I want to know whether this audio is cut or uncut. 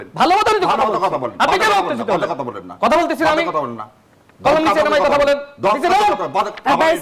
uncut